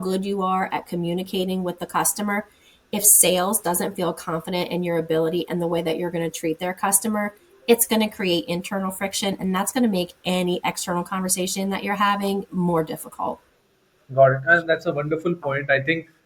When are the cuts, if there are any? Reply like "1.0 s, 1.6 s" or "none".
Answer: none